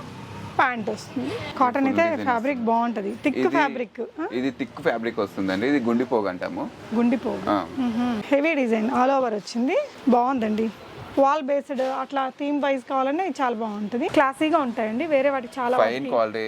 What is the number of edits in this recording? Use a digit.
3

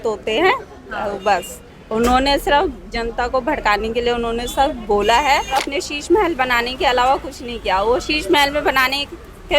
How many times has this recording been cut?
1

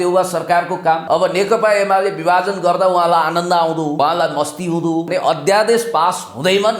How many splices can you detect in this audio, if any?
3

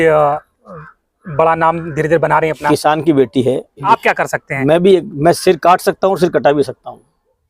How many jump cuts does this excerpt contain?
1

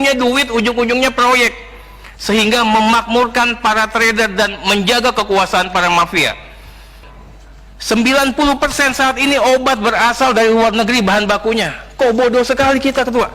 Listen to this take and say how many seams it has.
1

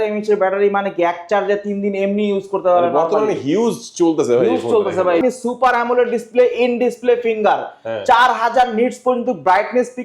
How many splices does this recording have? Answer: 1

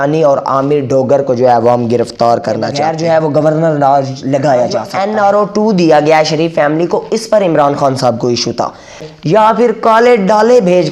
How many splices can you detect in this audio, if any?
3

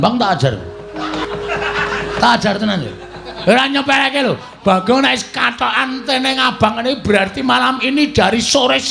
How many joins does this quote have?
1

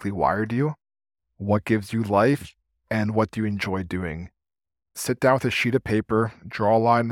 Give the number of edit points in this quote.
1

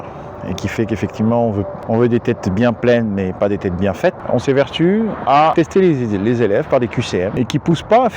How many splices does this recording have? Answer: 4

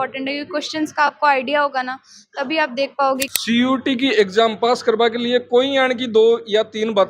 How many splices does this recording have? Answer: 1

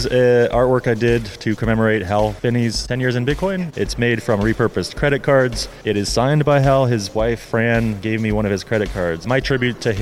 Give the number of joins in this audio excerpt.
3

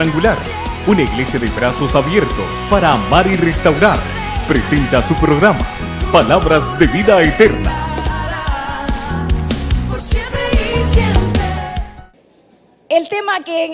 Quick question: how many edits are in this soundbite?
0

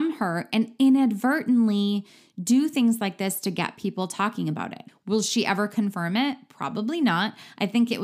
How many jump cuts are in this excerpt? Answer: 1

